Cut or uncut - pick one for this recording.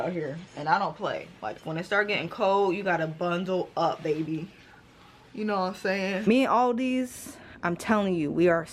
cut